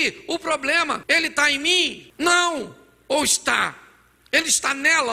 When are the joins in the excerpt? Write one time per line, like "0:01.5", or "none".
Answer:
0:01.0
0:02.0